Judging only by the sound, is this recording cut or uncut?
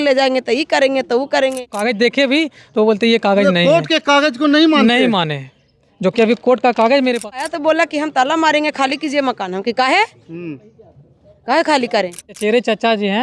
cut